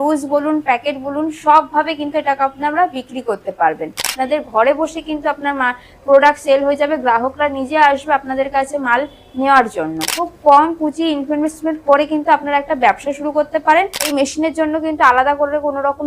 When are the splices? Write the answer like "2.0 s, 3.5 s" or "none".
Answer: 4.1 s, 10.1 s, 14.1 s